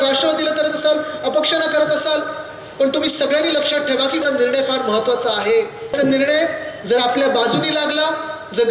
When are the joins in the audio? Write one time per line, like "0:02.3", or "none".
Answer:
0:04.2
0:05.9